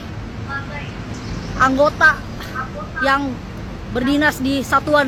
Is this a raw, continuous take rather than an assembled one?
yes; 0 cuts

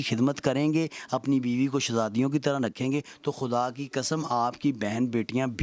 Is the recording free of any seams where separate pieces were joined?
yes; 0 cuts

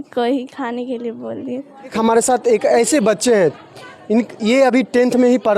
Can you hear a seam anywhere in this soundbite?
yes; 1 cut; at 1.9 s

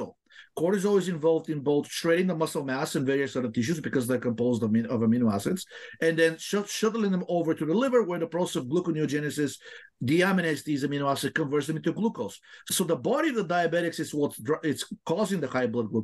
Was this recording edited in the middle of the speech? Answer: yes; 1 cut; at 12.6 s

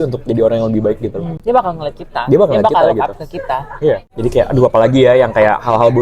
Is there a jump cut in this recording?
yes; 2 cuts; at 1.3 s, 4.1 s

